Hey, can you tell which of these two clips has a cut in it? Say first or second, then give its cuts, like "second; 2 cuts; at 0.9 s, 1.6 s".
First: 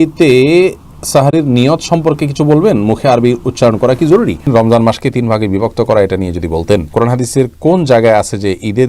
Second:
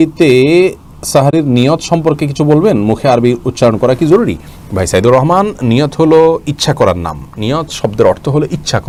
first; 2 cuts; at 4.5 s, 6.9 s